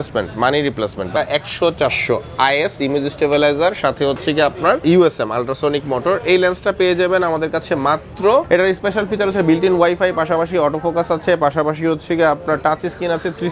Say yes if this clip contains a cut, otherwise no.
yes